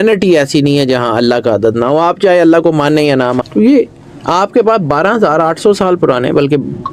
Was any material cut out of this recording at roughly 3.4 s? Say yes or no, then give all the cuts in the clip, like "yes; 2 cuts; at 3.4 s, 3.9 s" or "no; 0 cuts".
yes; 1 cut; at 3.4 s